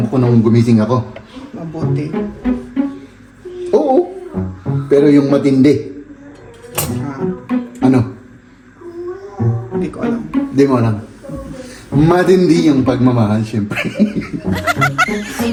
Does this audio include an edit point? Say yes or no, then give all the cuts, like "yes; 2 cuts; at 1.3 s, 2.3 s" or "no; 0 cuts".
no; 0 cuts